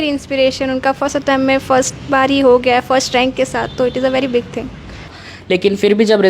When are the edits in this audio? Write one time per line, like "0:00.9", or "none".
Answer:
0:05.2